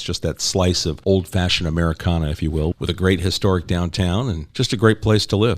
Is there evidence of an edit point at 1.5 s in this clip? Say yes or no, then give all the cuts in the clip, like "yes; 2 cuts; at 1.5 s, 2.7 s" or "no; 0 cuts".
no; 2 cuts; at 2.7 s, 4.4 s